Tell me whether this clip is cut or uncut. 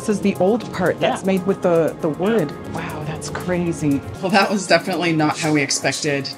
cut